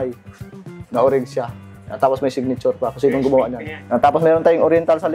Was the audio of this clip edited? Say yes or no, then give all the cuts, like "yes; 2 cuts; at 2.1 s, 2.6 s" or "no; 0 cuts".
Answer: yes; 1 cut; at 3.7 s